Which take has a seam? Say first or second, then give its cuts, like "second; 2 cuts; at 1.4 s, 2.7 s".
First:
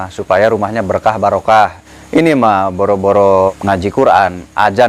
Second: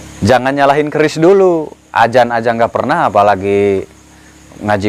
first; 2 cuts; at 1.8 s, 3.6 s